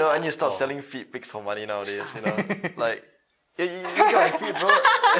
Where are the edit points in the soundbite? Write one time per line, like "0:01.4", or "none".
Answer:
none